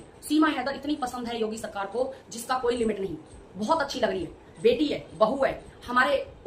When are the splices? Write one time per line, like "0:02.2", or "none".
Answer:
none